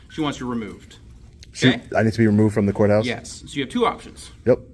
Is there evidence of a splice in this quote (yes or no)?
no